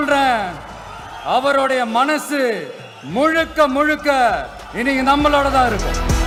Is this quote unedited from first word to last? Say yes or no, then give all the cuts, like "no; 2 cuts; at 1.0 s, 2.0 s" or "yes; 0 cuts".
yes; 0 cuts